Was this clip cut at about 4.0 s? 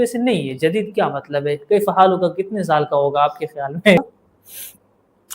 yes; 1 cut; at 4.0 s

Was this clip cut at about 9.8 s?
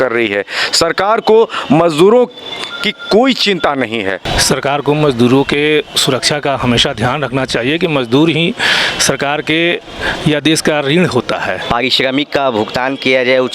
no; 2 cuts; at 4.3 s, 11.6 s

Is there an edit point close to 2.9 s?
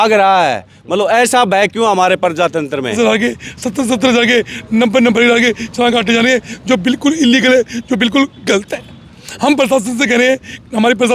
yes; 1 cut; at 2.9 s

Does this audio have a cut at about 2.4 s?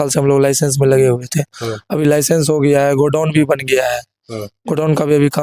no; 0 cuts

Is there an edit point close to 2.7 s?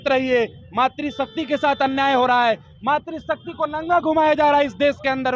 no; 0 cuts

